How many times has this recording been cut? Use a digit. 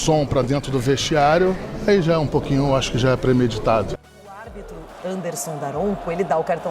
1